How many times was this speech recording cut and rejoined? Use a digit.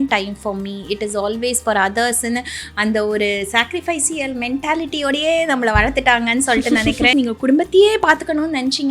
1